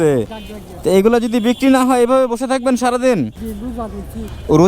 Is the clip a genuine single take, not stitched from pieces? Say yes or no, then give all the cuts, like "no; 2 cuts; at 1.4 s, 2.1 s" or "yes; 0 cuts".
no; 2 cuts; at 0.9 s, 3.4 s